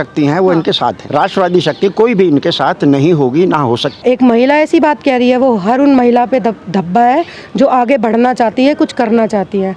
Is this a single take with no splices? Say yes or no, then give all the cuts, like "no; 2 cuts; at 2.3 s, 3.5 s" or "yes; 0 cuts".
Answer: no; 2 cuts; at 1.0 s, 3.9 s